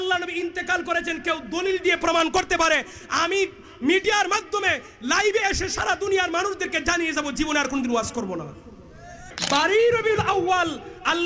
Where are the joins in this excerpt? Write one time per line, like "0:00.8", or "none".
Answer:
0:09.3